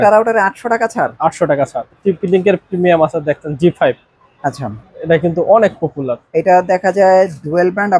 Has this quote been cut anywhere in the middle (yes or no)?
yes